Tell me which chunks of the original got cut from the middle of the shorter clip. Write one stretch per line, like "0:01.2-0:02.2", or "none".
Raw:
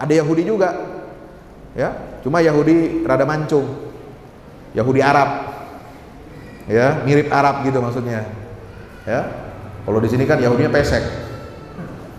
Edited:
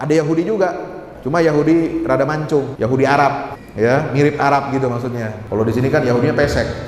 0:01.1-0:02.1
0:03.7-0:04.7
0:05.5-0:06.5
0:08.3-0:09.7